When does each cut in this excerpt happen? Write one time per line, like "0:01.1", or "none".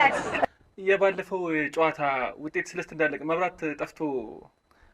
none